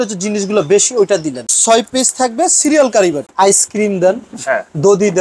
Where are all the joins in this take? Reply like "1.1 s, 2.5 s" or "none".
1.5 s, 3.2 s